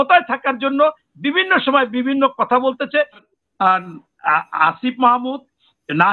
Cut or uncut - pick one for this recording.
cut